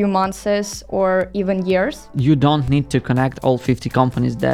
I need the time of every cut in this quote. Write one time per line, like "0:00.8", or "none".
0:02.1